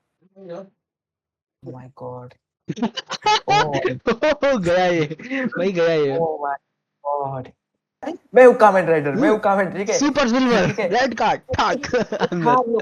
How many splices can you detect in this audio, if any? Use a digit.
1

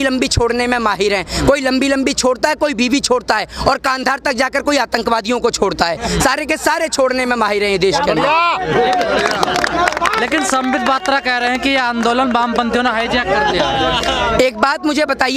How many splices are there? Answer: 0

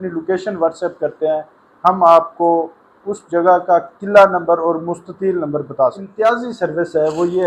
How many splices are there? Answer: 1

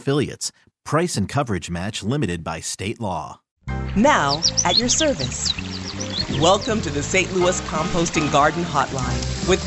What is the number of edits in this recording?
1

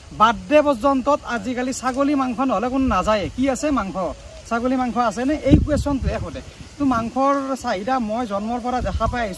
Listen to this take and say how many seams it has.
0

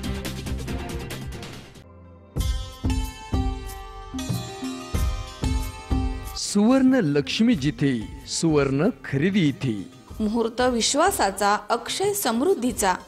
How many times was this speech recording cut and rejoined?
1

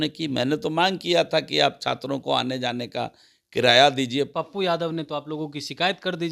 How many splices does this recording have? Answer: 1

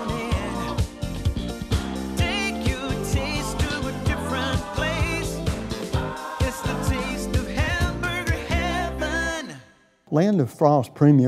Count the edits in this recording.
1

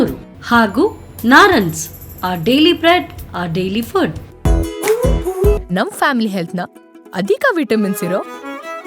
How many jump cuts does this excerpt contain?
1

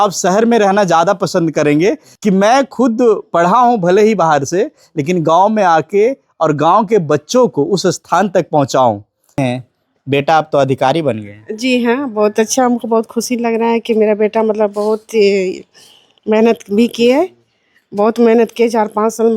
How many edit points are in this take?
2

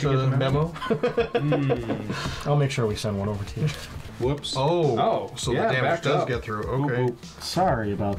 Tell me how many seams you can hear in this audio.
1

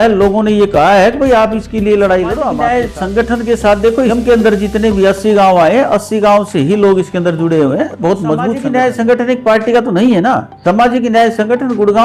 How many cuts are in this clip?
3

